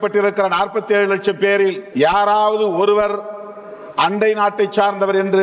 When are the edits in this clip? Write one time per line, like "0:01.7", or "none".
0:01.8